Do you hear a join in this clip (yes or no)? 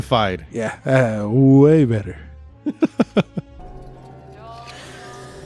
no